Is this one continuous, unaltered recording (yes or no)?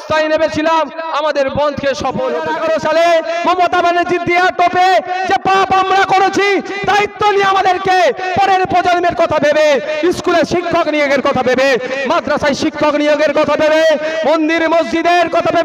no